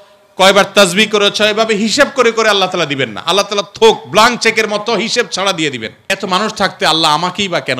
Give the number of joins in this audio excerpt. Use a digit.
1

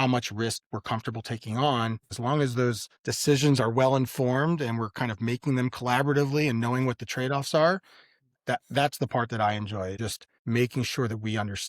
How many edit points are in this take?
2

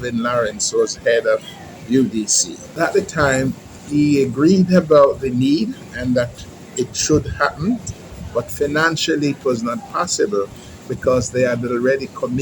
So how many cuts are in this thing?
1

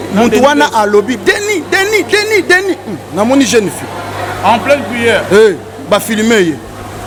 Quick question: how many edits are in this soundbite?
0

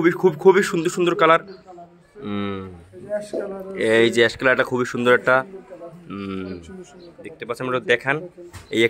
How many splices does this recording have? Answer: 0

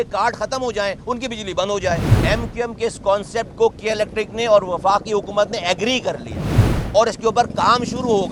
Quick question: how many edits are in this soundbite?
1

